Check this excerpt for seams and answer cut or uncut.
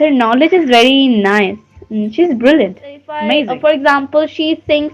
cut